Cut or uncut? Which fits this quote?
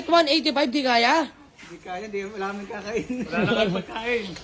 uncut